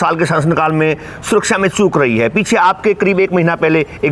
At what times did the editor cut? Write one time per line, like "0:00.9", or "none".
none